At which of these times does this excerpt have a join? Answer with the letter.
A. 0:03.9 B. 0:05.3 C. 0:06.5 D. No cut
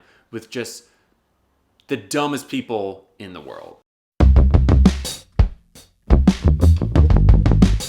A